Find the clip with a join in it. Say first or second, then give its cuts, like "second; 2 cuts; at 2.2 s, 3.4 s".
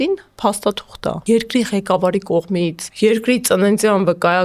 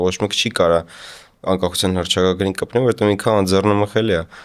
first; 2 cuts; at 1.2 s, 2.8 s